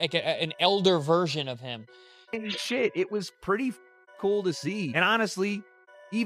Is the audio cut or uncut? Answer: cut